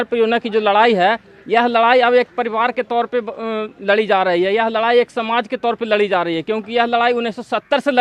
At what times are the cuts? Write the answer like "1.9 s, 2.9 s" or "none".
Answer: none